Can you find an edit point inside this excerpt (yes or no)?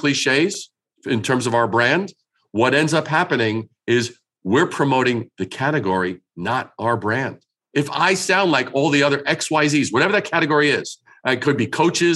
no